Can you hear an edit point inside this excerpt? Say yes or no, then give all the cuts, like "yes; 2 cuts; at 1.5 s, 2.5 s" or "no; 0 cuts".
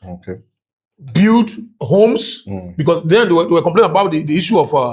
yes; 1 cut; at 1.7 s